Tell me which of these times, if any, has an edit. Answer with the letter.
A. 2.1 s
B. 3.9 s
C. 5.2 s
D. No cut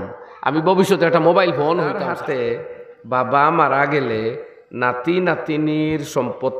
A